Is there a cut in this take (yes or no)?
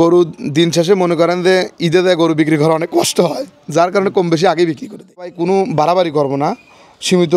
yes